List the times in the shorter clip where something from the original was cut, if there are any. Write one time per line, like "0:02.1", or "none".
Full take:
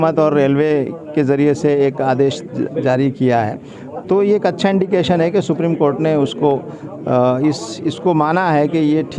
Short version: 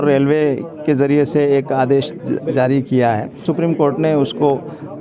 0:03.5